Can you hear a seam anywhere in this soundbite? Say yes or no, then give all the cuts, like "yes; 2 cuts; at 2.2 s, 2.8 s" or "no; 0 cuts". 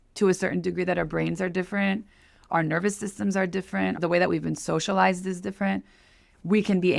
yes; 2 cuts; at 2.4 s, 4.0 s